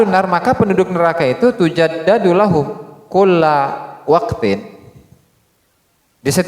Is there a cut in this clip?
no; 0 cuts

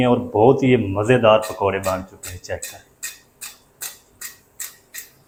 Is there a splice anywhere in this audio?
no; 0 cuts

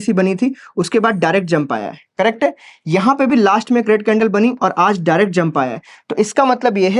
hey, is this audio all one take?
yes; 0 cuts

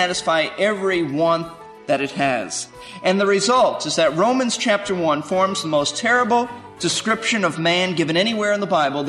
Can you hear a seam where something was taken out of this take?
yes; 1 cut; at 6.6 s

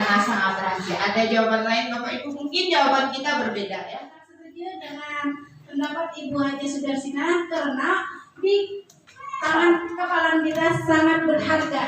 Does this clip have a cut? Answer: yes; 1 cut; at 4.4 s

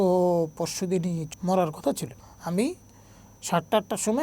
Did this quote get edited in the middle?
yes; 2 cuts; at 1.2 s, 2.1 s

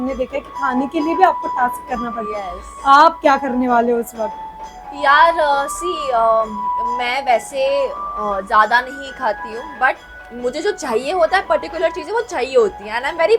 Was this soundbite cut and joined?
no; 0 cuts

